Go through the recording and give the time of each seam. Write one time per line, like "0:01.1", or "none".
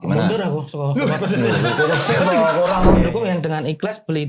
0:03.0